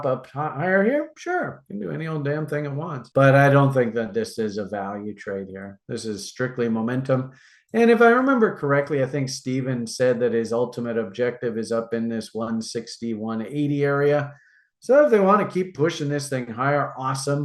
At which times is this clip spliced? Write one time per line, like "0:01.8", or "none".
none

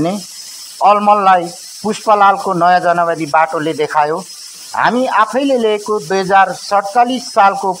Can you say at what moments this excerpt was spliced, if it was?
none

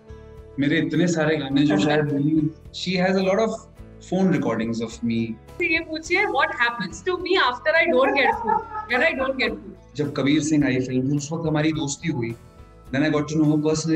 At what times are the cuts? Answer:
0:02.7
0:05.5
0:09.7

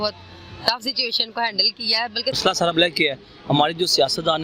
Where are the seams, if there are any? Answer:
0:02.3

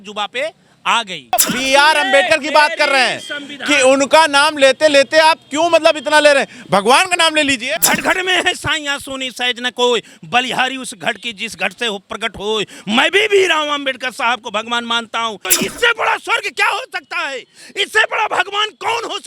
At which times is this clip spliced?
0:01.3
0:07.7
0:15.5

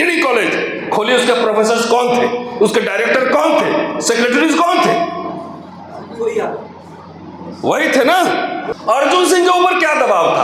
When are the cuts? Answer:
0:08.7

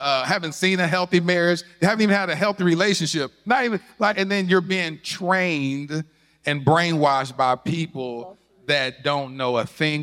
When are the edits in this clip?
none

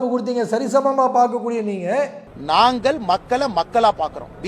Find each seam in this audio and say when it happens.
0:02.3

